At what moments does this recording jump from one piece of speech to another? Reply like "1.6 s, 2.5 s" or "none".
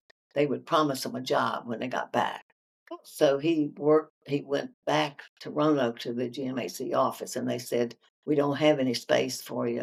none